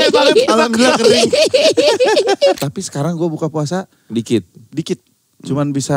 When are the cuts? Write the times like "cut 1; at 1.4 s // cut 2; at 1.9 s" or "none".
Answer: cut 1; at 2.6 s